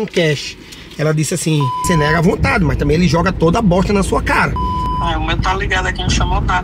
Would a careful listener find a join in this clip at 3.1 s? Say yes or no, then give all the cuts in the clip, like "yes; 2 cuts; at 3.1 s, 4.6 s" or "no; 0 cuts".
no; 2 cuts; at 1.8 s, 4.8 s